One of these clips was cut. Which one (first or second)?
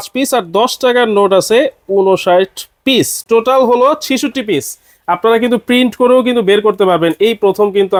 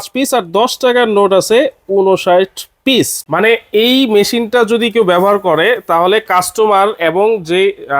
second